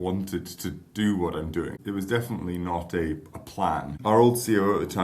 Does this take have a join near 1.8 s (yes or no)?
yes